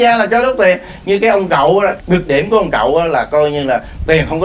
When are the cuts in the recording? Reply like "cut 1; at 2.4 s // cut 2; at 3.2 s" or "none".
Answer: cut 1; at 2.0 s